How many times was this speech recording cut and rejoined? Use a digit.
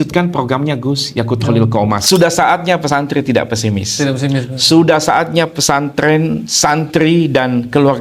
1